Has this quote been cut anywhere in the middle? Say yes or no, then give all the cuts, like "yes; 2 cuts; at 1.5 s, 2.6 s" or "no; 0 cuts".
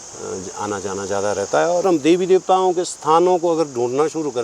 yes; 1 cut; at 1.8 s